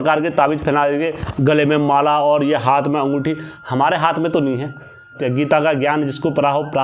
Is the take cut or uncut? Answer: cut